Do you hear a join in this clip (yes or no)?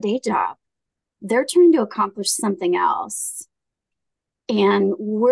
no